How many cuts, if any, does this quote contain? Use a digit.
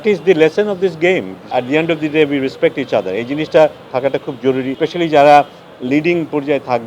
2